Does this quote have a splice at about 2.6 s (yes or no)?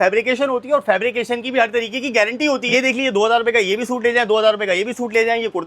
yes